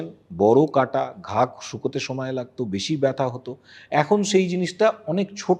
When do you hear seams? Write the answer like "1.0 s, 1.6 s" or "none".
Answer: none